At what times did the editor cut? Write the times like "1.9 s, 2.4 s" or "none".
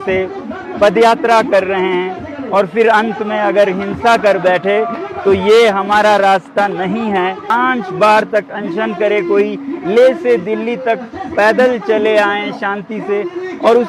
7.5 s